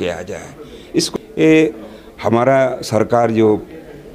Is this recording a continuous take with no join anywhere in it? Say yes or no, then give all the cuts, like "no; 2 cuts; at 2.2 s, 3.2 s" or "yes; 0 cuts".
no; 1 cut; at 1.1 s